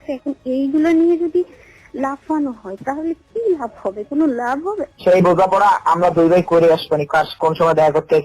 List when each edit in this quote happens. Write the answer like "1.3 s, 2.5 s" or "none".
4.8 s